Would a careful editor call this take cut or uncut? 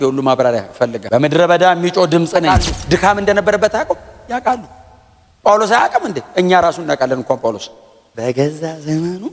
cut